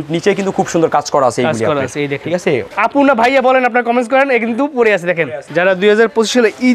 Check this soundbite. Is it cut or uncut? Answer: cut